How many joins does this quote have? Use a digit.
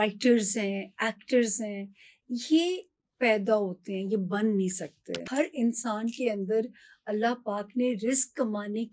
1